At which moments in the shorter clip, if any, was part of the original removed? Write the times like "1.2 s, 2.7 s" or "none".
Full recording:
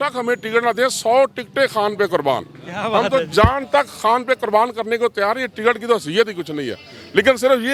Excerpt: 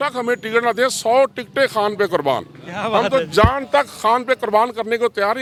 none